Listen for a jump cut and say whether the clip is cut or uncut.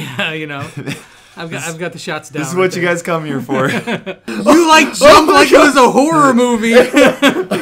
cut